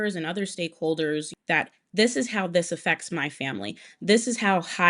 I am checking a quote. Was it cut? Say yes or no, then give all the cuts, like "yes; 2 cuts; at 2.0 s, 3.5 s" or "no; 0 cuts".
yes; 1 cut; at 1.3 s